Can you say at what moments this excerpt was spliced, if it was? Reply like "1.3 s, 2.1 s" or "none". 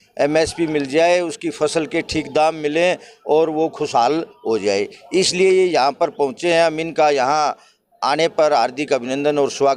none